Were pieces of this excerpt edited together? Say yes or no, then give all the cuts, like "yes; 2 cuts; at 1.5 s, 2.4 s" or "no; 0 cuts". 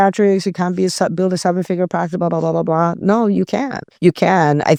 no; 0 cuts